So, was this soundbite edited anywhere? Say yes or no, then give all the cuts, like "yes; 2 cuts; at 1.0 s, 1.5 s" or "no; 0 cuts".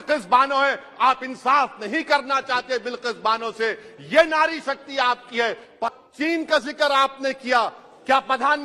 yes; 1 cut; at 6.0 s